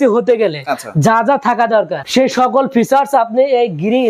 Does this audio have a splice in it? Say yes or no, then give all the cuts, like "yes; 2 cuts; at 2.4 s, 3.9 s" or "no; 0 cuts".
no; 0 cuts